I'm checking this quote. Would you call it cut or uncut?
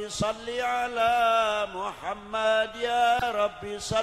uncut